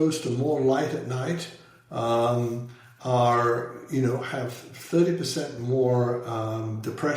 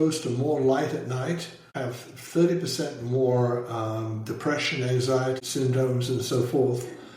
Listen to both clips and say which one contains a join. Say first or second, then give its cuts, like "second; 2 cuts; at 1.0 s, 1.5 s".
second; 2 cuts; at 1.8 s, 5.4 s